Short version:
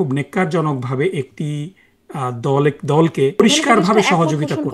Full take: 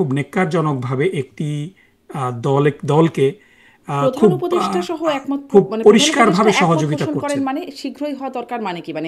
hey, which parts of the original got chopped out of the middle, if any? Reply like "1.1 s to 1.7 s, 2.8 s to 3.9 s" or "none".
3.4 s to 5.9 s